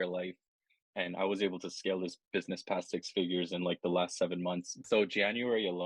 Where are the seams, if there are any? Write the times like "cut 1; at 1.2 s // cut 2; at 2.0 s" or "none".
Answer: cut 1; at 4.7 s

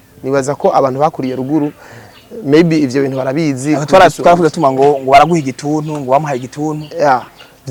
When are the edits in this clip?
none

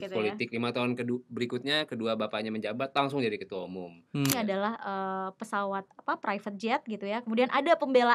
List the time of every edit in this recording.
cut 1; at 4.3 s

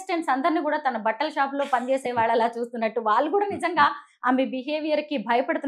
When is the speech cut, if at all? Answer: none

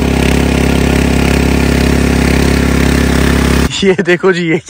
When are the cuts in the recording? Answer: none

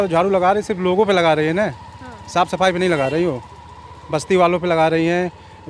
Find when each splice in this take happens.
none

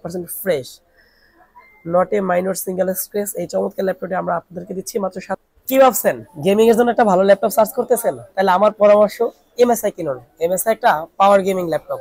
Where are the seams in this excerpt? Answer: cut 1; at 5.4 s

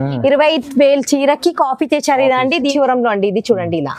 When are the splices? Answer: cut 1; at 2.7 s

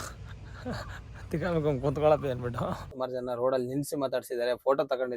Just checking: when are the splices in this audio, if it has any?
cut 1; at 2.9 s

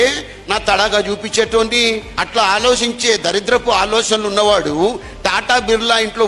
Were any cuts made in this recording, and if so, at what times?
cut 1; at 2.1 s

